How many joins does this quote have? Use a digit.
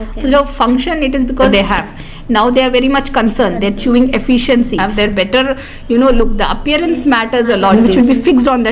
3